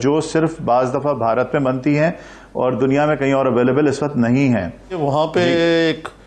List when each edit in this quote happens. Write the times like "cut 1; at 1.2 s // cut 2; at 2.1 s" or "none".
cut 1; at 5.0 s